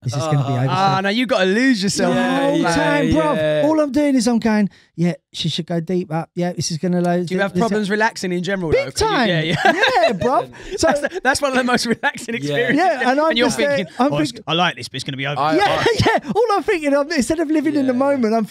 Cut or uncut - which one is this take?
uncut